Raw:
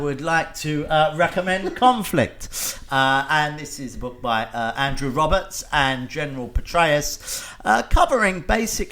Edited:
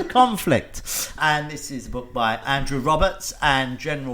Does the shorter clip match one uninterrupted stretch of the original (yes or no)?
no